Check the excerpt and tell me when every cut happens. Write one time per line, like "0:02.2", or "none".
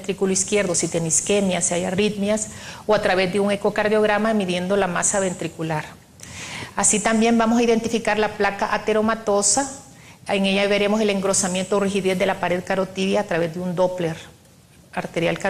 0:12.6